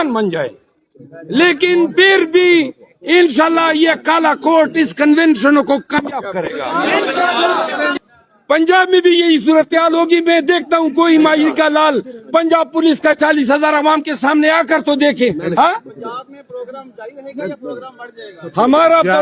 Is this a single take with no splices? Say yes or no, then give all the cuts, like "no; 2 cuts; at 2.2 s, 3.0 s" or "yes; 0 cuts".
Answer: no; 2 cuts; at 7.9 s, 15.6 s